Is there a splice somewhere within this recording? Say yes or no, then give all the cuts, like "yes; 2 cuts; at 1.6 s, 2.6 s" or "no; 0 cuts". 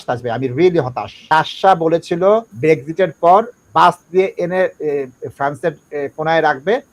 yes; 2 cuts; at 1.1 s, 2.5 s